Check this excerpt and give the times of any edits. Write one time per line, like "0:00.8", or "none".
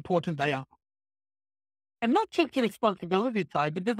none